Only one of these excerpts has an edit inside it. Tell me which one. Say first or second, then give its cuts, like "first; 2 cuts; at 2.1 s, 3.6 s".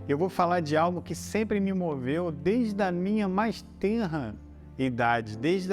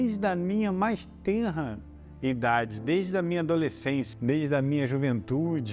second; 1 cut; at 4.1 s